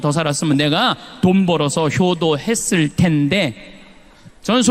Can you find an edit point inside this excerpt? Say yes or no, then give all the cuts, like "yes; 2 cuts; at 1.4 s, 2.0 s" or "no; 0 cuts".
no; 0 cuts